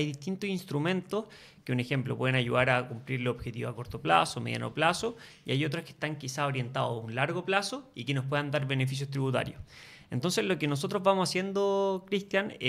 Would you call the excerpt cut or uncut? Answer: uncut